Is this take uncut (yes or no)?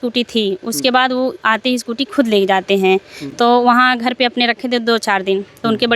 yes